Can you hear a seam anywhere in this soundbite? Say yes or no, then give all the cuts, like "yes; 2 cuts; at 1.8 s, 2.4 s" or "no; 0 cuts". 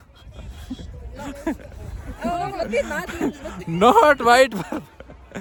no; 0 cuts